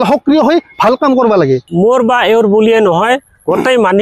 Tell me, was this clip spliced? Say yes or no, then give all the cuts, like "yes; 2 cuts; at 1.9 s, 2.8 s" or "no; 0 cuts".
yes; 1 cut; at 1.7 s